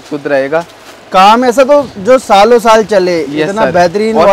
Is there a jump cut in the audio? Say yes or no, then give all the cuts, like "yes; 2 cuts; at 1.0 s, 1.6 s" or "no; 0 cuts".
no; 0 cuts